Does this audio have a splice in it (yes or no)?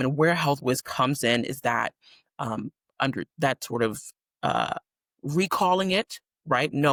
no